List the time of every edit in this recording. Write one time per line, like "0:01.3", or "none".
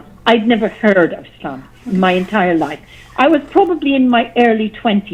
none

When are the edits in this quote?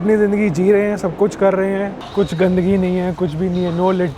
0:01.9

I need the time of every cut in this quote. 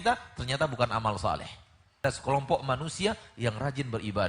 0:02.0

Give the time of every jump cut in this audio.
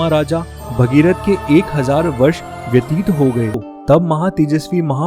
0:03.7

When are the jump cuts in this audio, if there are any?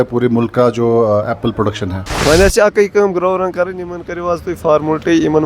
0:02.0

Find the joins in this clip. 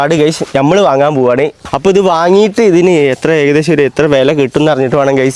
0:01.6

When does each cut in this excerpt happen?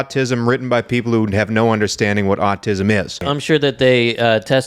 0:03.3

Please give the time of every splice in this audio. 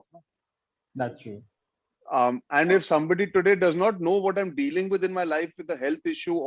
none

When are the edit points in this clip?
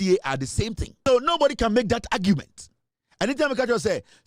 0:01.1

